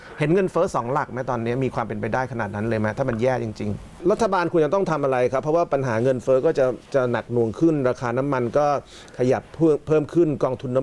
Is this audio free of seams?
no; 1 cut; at 4.0 s

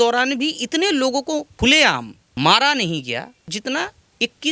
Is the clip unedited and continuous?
no; 2 cuts; at 1.7 s, 3.4 s

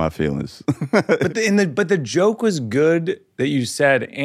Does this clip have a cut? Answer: yes; 1 cut; at 1.2 s

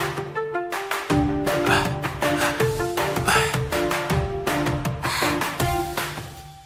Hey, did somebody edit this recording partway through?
no; 0 cuts

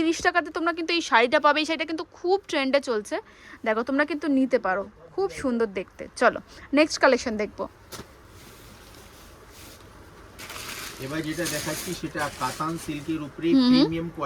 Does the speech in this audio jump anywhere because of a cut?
no; 0 cuts

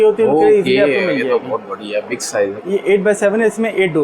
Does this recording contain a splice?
yes; 1 cut; at 2.6 s

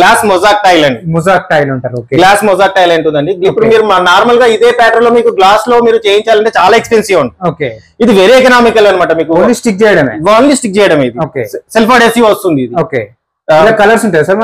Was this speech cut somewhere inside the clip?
no; 0 cuts

